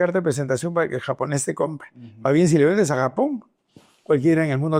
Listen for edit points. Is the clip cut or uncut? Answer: uncut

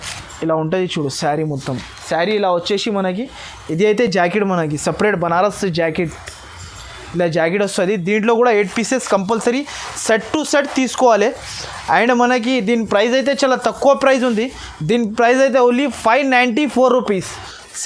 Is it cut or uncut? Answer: uncut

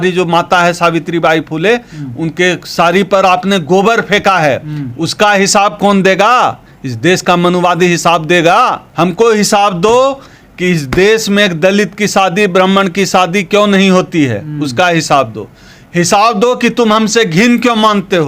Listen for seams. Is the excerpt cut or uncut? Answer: cut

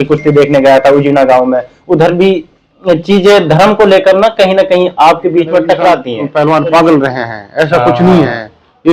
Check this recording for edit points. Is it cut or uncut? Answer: cut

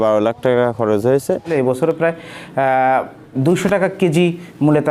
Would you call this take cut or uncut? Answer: cut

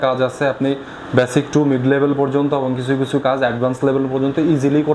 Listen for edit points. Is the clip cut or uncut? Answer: uncut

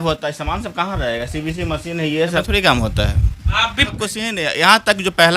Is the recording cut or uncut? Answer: cut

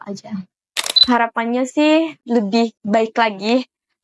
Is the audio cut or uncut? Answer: cut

